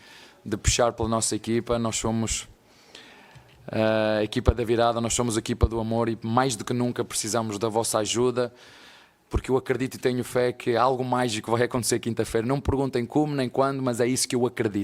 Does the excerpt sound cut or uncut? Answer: uncut